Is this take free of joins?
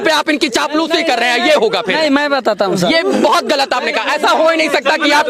yes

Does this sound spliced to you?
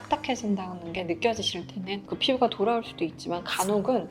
yes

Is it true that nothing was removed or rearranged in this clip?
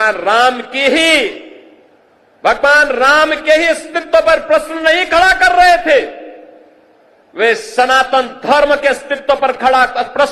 yes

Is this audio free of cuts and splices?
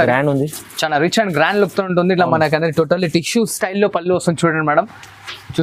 yes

